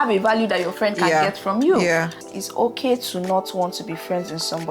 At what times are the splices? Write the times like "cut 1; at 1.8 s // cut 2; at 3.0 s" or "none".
cut 1; at 2.2 s